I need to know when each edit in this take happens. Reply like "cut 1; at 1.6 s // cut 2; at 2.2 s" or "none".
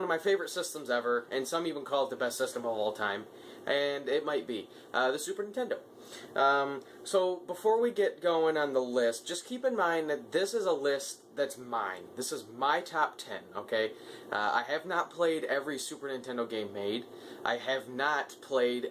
cut 1; at 2.9 s

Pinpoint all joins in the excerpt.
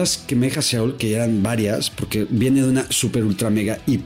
none

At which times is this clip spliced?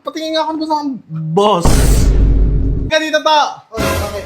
cut 1; at 2.9 s

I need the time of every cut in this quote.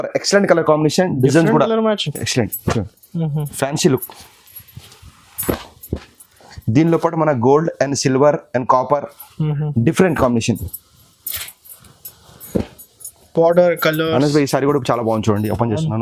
none

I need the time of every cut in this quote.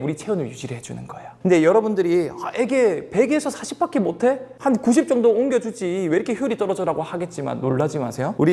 none

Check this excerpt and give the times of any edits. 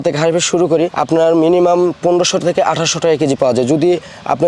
cut 1; at 0.9 s

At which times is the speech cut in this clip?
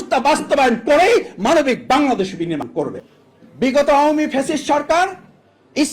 cut 1; at 2.7 s

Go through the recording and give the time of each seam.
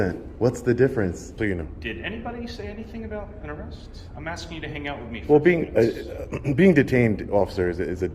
cut 1; at 1.4 s

